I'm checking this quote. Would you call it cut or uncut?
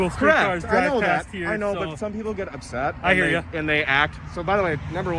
uncut